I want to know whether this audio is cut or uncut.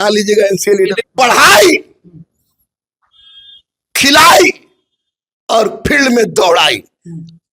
cut